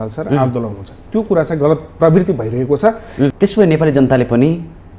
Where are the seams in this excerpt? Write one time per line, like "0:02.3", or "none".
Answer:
0:03.3